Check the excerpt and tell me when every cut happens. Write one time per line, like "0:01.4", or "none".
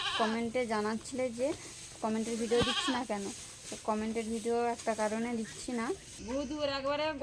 0:06.1